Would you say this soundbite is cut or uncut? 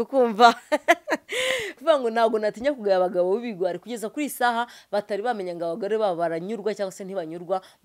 cut